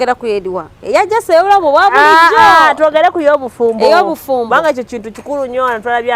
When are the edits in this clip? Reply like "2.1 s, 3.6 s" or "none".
none

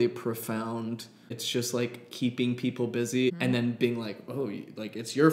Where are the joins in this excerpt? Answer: 1.4 s, 3.3 s

